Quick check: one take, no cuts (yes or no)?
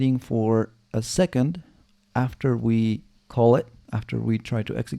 no